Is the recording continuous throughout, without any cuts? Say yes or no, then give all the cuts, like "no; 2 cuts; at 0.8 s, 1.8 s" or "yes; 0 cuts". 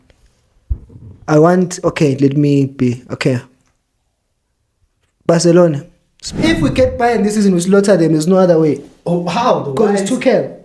no; 1 cut; at 6.3 s